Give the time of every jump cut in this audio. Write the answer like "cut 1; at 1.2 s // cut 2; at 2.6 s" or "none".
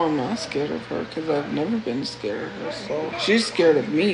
cut 1; at 3.1 s